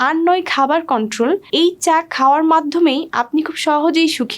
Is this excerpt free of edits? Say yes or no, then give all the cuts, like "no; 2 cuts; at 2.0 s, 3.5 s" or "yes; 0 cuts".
no; 1 cut; at 1.5 s